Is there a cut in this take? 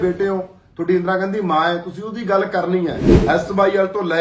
yes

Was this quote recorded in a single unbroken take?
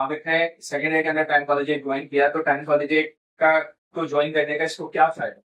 yes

